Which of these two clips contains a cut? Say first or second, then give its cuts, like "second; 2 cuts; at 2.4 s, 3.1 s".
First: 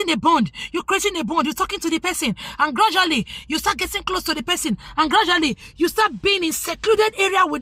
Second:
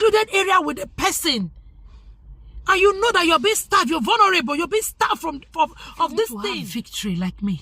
second; 1 cut; at 6.6 s